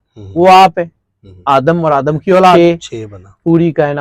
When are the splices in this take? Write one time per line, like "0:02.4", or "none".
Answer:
0:02.6